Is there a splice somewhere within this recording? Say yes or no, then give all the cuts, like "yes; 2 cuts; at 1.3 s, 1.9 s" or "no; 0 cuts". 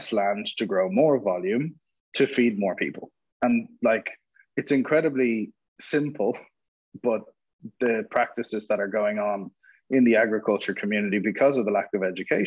no; 0 cuts